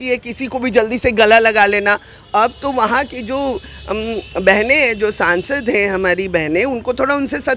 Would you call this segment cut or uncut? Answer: uncut